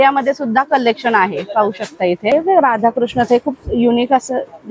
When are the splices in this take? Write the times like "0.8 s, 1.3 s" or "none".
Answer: 2.3 s